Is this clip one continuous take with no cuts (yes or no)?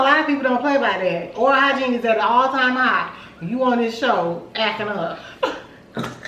yes